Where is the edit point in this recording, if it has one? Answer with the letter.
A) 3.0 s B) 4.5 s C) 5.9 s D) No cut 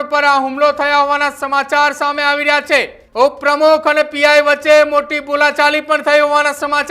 A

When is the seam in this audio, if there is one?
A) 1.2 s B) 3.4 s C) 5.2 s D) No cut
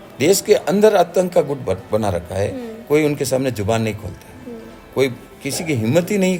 D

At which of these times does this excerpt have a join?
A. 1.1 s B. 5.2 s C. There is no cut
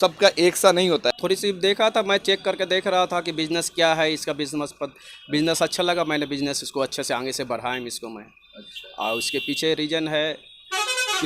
A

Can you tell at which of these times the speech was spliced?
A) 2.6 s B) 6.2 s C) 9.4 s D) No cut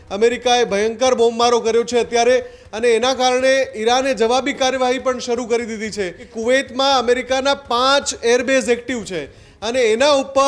B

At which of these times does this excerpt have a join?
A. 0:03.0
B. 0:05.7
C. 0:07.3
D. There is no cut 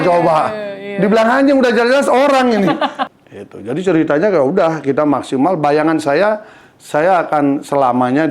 A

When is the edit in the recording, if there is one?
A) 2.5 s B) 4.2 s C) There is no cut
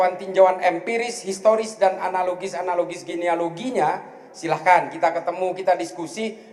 C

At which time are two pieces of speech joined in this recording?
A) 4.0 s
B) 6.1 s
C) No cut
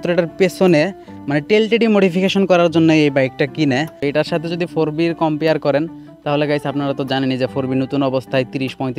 A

